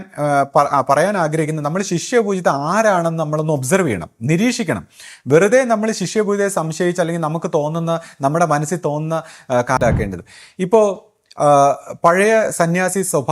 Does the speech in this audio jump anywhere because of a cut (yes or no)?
yes